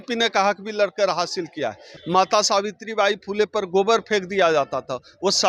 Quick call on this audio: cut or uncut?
cut